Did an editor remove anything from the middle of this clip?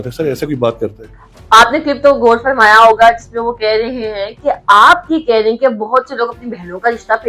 no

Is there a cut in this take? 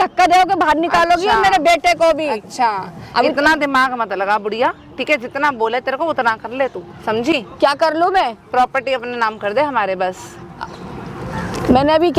no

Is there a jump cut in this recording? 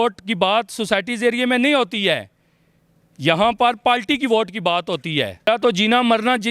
yes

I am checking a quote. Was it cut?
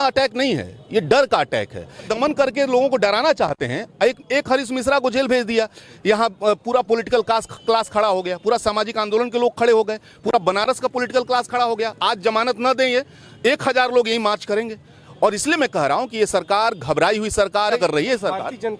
yes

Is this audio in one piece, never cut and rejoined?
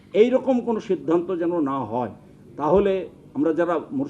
yes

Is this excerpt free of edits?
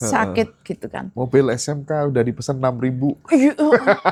yes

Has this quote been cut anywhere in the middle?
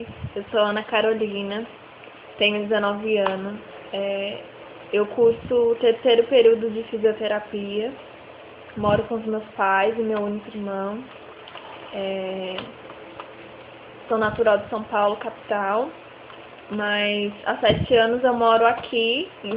no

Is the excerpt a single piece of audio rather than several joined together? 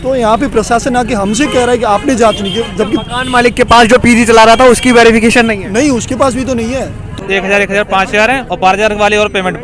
no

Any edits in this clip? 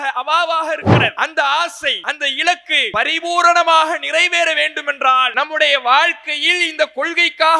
yes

